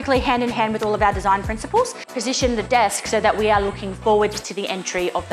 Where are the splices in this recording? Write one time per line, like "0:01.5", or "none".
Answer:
0:02.1